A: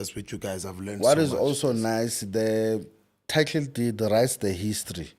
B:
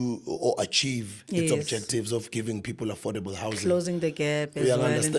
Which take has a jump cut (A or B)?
A